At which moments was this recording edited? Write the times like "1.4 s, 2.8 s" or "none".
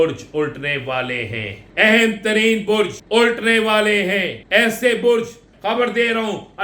1.6 s, 3.0 s, 4.4 s, 5.5 s